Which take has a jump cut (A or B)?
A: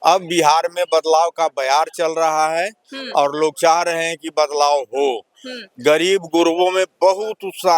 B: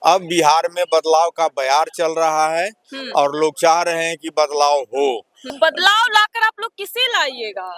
B